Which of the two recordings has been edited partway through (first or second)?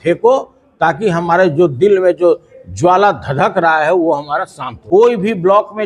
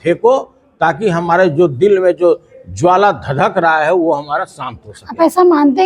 first